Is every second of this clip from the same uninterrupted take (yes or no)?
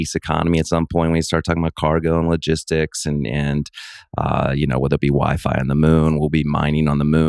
yes